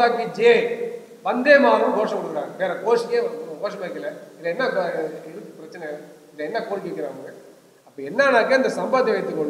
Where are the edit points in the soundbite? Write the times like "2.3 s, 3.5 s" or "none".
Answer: none